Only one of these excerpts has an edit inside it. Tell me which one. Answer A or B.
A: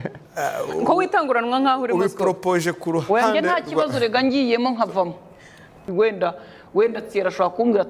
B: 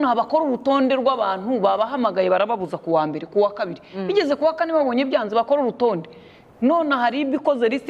A